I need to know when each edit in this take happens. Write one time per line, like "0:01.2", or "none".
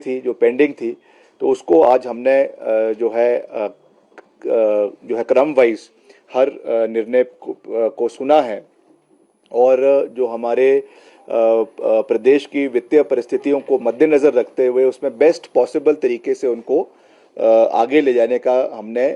none